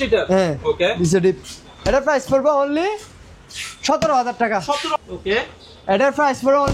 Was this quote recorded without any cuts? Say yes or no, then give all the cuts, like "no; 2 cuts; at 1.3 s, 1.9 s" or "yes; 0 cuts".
no; 1 cut; at 5.0 s